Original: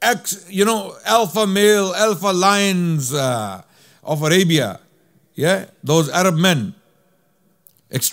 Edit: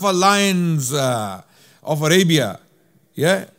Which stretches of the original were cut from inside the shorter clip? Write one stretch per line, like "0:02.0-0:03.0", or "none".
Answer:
none